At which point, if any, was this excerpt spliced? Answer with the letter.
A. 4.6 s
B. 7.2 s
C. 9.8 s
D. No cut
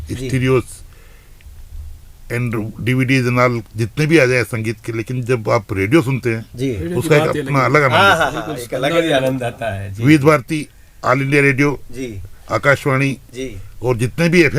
D